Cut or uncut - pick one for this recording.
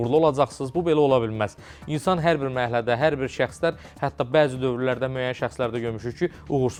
uncut